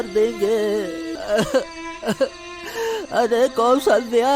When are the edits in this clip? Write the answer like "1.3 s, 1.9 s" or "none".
1.1 s